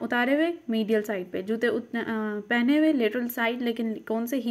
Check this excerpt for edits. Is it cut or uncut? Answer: uncut